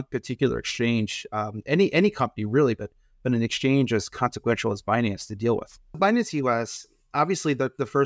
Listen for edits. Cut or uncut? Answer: cut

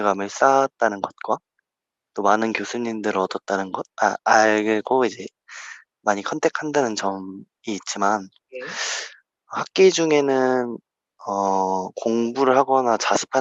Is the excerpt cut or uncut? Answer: uncut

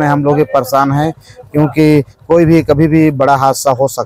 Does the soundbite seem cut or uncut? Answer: uncut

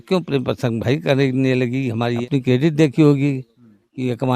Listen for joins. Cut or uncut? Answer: cut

